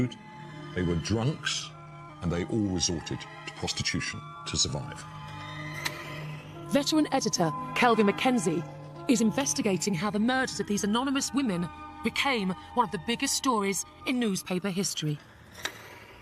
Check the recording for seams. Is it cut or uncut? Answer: cut